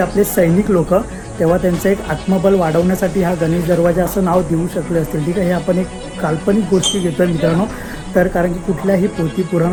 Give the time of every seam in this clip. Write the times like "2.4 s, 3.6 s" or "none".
none